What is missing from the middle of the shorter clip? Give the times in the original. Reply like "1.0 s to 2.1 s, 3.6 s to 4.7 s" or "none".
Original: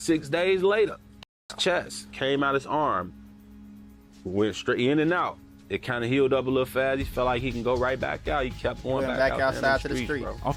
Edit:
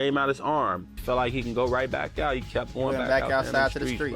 3.2 s to 7.1 s